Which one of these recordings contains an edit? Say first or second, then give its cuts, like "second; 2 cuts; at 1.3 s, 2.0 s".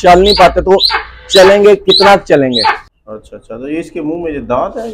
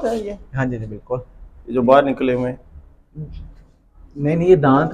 first; 1 cut; at 2.9 s